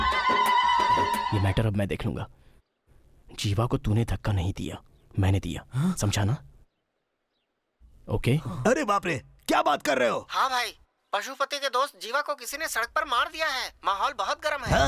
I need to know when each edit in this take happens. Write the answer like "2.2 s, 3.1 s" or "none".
1.3 s

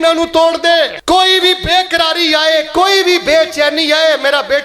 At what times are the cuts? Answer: 1.0 s

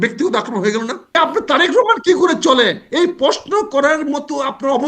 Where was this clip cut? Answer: 1.1 s

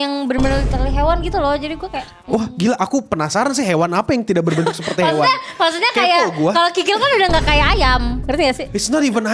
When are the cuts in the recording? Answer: 8.2 s

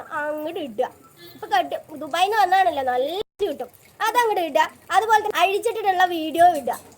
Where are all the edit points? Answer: 5.3 s

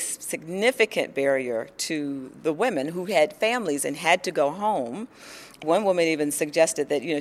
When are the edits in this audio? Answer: 5.6 s

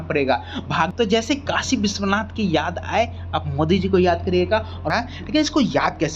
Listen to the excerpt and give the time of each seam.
0.9 s, 4.8 s

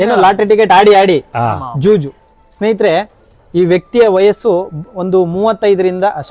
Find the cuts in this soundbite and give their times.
none

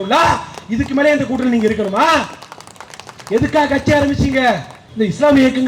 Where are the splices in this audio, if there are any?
4.8 s

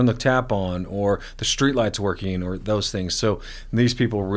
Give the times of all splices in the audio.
none

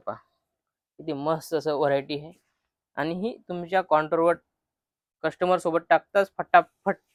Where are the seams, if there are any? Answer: none

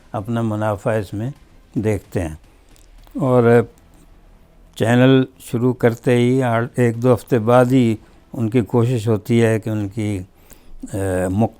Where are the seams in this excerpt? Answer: none

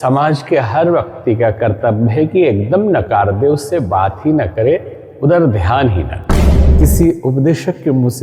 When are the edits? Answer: 6.6 s

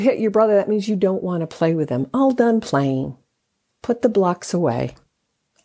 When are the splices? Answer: none

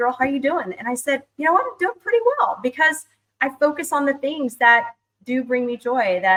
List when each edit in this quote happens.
none

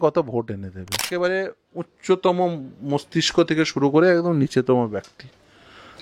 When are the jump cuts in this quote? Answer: 1.1 s

